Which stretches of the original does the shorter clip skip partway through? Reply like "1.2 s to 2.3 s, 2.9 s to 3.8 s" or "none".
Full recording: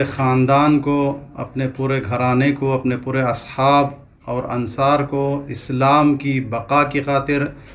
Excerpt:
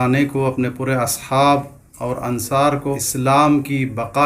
5.2 s to 5.5 s